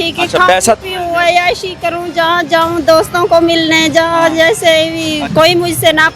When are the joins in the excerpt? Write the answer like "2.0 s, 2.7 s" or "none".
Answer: 5.2 s